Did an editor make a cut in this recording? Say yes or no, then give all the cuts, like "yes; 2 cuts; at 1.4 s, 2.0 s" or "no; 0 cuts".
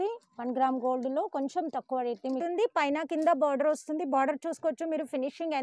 yes; 1 cut; at 2.3 s